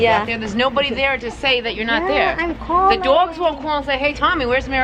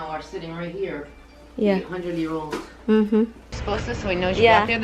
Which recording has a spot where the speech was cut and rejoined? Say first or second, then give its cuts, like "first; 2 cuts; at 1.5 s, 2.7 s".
second; 1 cut; at 3.4 s